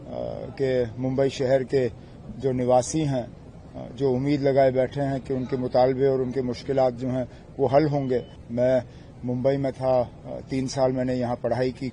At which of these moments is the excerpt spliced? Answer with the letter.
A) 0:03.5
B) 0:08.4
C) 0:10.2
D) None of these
B